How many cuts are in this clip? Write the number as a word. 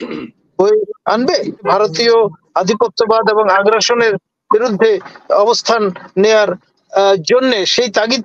one